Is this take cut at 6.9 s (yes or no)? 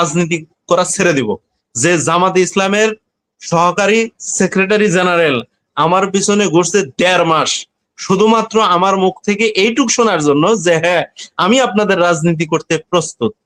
no